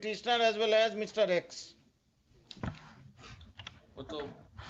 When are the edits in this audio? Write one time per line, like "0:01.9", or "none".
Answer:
none